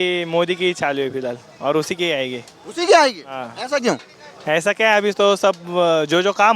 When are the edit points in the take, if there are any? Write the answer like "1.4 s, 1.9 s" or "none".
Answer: none